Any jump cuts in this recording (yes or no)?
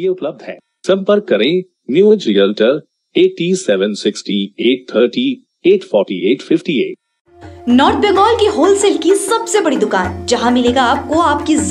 no